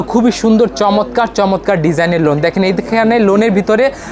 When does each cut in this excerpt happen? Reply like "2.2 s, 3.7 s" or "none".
none